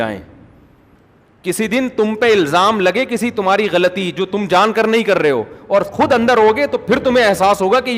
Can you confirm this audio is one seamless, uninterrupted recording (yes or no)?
no